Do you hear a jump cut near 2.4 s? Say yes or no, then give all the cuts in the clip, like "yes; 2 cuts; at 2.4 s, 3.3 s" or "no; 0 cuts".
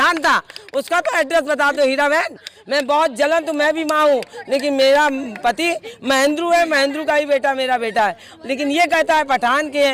no; 0 cuts